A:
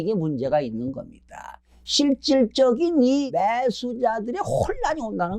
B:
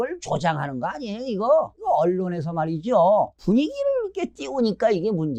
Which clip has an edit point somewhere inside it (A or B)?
A